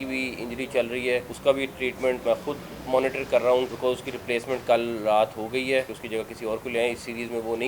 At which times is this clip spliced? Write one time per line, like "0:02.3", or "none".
0:01.3
0:02.2
0:03.7
0:06.0

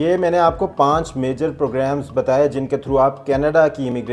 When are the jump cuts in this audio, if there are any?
none

